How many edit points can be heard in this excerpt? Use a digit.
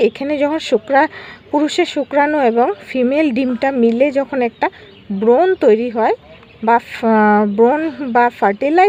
0